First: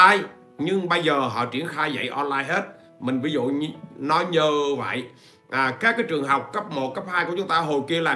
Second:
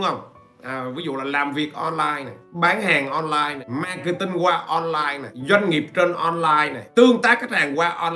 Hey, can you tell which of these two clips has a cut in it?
second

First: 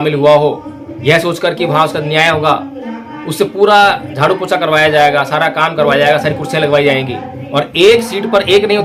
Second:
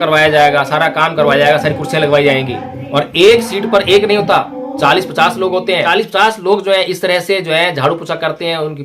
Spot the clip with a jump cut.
second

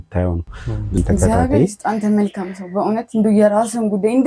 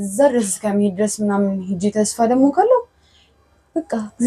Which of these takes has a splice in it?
first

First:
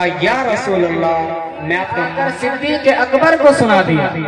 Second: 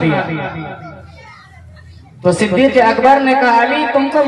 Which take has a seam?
first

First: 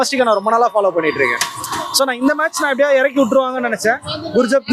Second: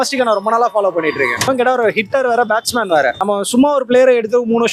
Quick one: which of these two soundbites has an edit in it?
second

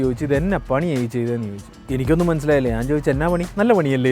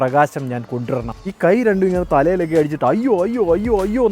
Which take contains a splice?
second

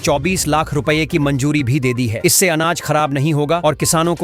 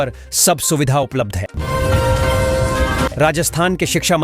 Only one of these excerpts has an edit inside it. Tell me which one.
second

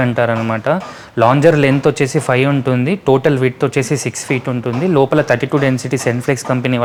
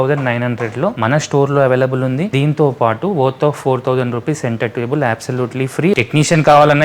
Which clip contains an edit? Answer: second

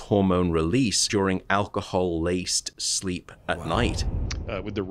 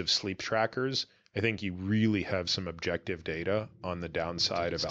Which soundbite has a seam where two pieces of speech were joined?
first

